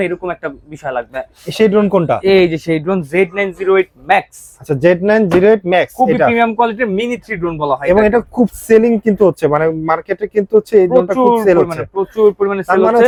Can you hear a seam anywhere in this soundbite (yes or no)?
no